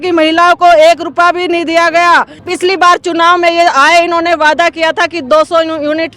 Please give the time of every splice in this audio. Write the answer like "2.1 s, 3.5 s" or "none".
2.5 s